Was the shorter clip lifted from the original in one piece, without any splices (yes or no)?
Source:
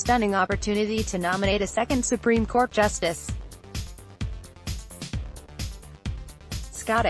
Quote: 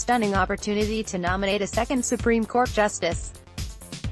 no